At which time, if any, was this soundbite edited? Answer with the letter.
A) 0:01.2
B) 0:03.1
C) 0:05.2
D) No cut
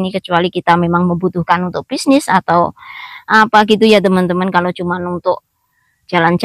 D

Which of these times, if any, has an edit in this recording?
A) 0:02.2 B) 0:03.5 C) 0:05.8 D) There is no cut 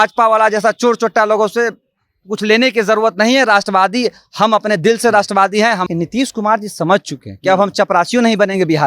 C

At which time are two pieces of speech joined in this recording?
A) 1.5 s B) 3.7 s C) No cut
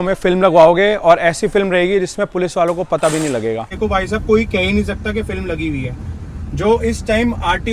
B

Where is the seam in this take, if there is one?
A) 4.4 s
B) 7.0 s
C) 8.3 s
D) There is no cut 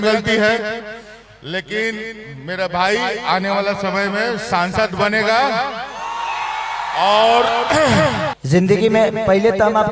C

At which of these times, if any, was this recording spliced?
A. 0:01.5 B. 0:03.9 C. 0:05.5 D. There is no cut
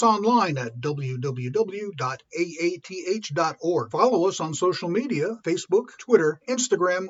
D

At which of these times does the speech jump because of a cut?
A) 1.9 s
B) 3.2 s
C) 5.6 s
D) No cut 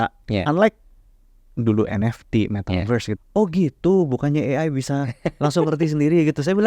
B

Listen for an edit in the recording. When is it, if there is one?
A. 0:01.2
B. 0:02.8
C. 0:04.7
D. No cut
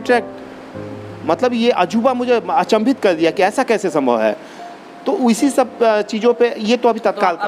D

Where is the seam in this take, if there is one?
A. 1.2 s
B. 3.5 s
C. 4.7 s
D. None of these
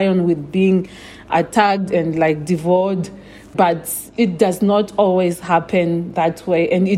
B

